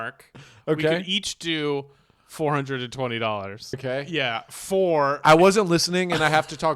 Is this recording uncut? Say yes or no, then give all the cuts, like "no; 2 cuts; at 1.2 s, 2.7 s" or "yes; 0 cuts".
no; 1 cut; at 3.8 s